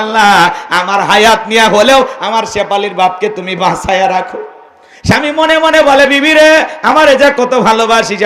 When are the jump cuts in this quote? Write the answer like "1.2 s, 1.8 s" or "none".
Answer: none